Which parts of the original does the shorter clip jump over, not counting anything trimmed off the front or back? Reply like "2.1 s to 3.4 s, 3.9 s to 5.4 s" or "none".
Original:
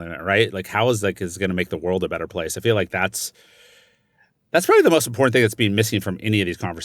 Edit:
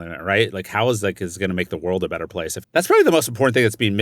2.5 s to 4.3 s